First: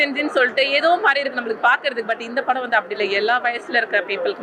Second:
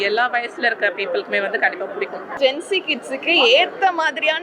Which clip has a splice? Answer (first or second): second